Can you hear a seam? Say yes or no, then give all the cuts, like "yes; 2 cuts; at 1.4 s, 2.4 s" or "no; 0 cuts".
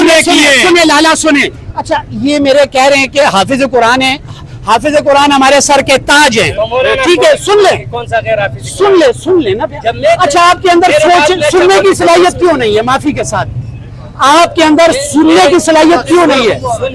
no; 0 cuts